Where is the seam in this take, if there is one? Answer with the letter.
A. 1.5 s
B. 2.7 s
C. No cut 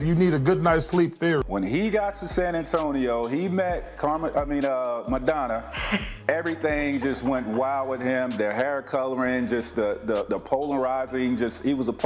A